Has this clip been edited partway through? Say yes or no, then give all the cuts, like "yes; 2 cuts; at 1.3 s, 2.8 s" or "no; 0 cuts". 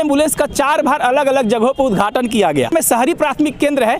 yes; 1 cut; at 2.7 s